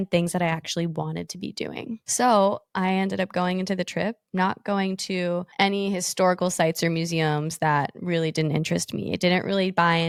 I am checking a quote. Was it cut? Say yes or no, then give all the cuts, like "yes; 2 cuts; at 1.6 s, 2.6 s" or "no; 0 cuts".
no; 0 cuts